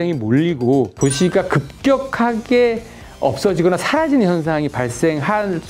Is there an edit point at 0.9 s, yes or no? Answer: yes